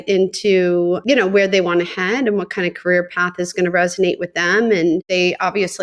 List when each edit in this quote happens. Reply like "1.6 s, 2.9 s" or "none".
1.0 s, 5.1 s